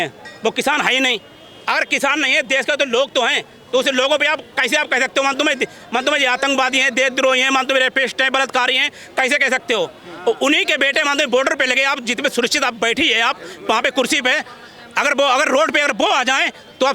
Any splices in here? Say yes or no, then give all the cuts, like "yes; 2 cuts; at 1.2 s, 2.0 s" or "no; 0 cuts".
no; 0 cuts